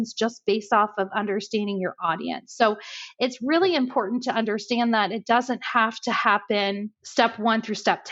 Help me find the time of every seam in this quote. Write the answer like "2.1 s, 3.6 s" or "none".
7.0 s